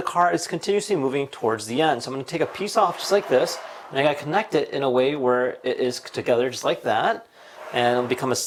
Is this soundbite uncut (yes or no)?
yes